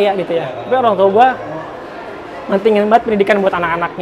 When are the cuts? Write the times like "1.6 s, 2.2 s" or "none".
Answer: none